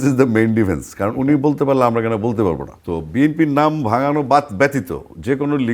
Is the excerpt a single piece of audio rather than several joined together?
no; 1 cut; at 2.7 s

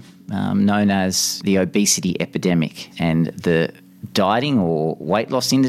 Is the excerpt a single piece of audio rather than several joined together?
no; 2 cuts; at 1.4 s, 2.9 s

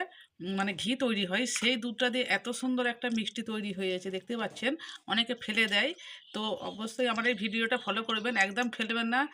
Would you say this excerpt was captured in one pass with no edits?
yes; 0 cuts

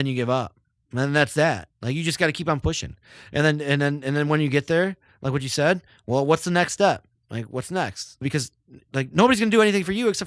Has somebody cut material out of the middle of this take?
yes; 1 cut; at 8.2 s

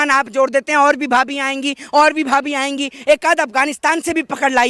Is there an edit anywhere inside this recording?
no; 0 cuts

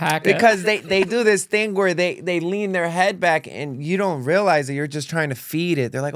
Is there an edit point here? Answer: no; 0 cuts

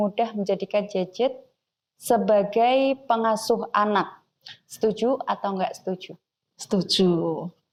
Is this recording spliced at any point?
no; 0 cuts

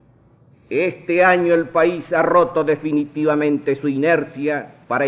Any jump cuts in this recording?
no; 0 cuts

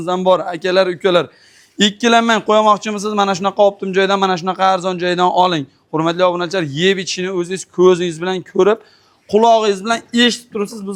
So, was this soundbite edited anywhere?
no; 0 cuts

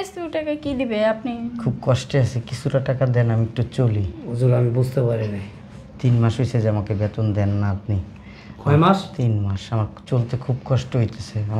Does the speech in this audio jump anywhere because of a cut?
no; 0 cuts

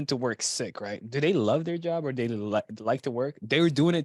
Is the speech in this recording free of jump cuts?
yes; 0 cuts

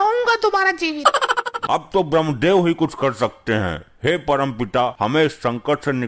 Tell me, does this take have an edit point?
yes; 1 cut; at 1.6 s

